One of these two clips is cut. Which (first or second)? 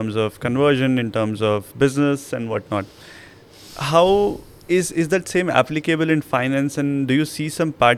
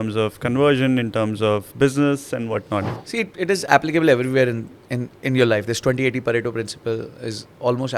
second